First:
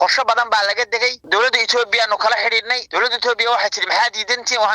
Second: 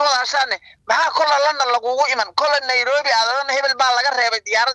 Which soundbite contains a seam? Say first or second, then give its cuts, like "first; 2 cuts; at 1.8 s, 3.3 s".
first; 2 cuts; at 1.2 s, 2.8 s